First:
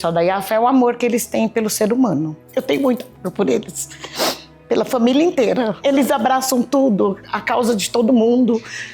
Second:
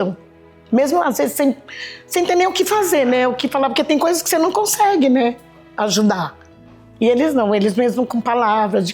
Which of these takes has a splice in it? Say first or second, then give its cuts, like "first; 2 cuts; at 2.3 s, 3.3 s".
first; 2 cuts; at 2.4 s, 5.7 s